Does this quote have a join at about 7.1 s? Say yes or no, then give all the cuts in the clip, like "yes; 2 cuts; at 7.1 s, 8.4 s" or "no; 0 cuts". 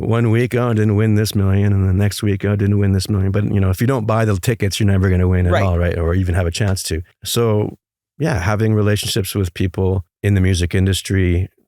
yes; 2 cuts; at 7.1 s, 10.1 s